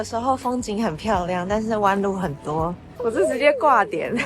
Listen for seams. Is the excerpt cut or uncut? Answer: cut